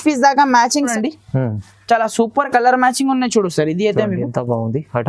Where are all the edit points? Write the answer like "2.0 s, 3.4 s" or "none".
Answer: 0.9 s